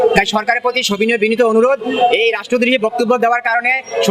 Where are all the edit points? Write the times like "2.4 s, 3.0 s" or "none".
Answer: none